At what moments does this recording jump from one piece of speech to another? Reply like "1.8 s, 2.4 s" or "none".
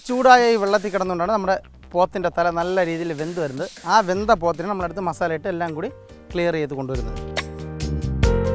7.1 s